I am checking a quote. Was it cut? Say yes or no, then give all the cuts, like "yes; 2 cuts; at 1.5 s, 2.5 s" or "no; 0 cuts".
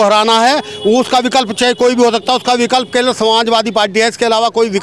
no; 0 cuts